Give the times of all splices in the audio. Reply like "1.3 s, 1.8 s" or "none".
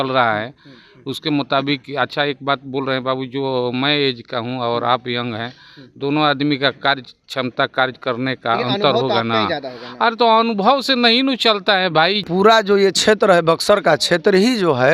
12.2 s

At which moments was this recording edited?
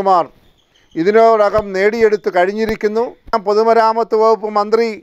3.4 s

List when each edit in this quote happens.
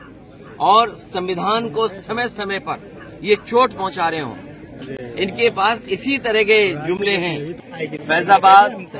7.6 s

